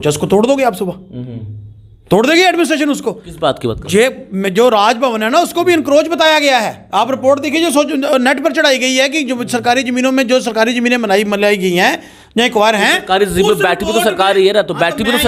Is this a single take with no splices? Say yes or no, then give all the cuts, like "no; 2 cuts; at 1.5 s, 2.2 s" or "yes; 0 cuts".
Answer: yes; 0 cuts